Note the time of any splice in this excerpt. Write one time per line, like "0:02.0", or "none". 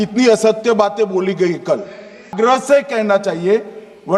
0:02.3

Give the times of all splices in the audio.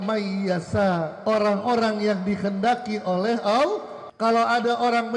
0:01.1
0:04.0

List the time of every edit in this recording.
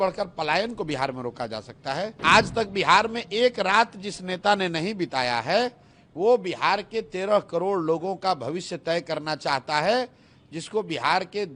0:02.1

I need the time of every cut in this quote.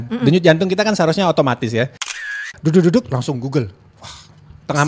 0:02.3

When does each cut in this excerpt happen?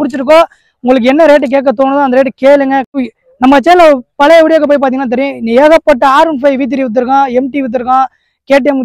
0:02.9

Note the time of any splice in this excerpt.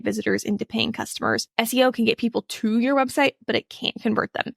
0:01.5

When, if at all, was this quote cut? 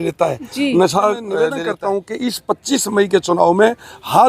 0:01.5

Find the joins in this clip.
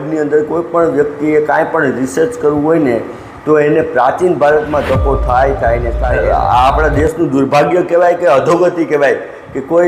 0:06.0

